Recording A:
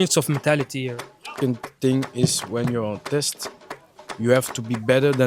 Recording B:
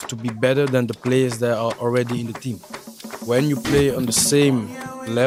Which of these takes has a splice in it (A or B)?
A